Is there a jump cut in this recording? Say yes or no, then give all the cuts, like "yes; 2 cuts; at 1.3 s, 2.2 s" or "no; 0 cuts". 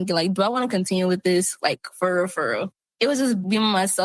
yes; 1 cut; at 3.0 s